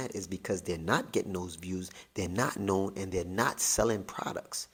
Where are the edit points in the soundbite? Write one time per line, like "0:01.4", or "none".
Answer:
none

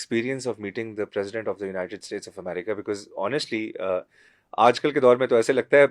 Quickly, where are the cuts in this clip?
none

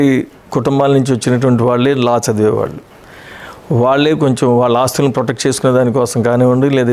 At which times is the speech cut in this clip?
none

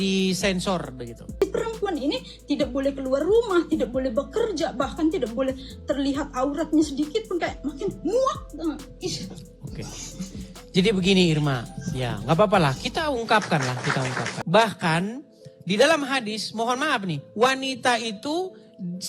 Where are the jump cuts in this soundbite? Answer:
0:01.4
0:14.3

